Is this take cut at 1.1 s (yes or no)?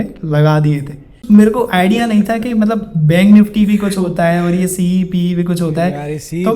yes